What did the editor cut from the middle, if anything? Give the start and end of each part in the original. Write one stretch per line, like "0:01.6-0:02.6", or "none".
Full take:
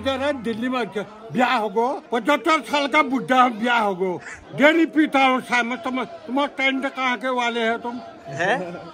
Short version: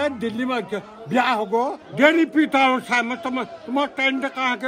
0:02.0-0:04.4

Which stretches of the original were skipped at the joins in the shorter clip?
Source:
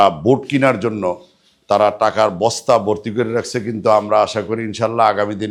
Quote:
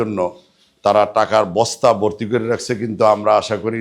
none

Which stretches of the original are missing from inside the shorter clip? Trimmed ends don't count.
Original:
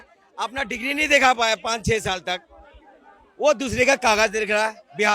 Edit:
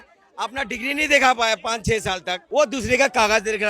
0:02.3-0:03.2

